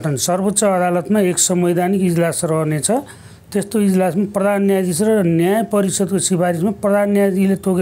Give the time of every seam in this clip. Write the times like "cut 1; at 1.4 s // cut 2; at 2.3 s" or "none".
none